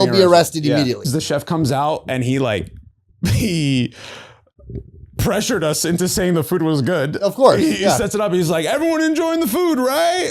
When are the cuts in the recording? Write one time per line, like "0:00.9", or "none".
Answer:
0:01.1